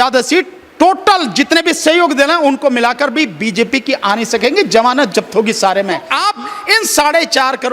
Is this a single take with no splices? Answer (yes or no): no